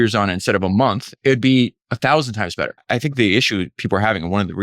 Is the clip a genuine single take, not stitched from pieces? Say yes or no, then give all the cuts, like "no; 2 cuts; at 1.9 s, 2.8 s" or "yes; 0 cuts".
no; 3 cuts; at 1.2 s, 1.8 s, 2.8 s